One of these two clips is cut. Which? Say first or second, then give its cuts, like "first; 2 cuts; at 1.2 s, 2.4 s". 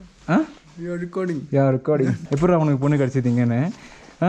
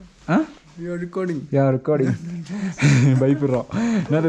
first; 1 cut; at 2.2 s